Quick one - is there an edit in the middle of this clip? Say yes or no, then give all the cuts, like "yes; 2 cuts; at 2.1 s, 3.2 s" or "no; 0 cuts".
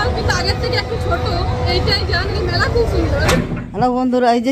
yes; 1 cut; at 3.3 s